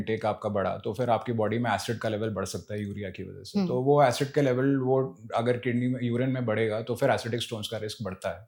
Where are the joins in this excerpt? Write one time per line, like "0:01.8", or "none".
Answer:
none